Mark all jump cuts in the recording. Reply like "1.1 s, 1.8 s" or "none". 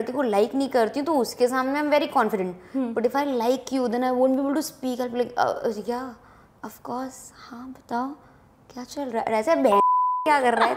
none